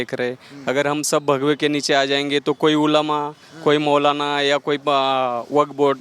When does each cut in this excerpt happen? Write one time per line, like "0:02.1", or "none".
none